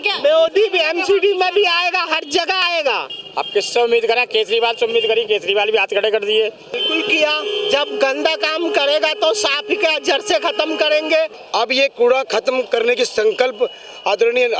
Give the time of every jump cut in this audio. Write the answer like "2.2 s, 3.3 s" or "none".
2.7 s, 6.8 s, 11.4 s